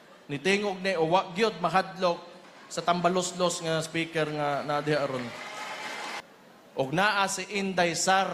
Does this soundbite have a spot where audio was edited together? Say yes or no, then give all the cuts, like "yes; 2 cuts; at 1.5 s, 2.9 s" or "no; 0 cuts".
yes; 1 cut; at 6.2 s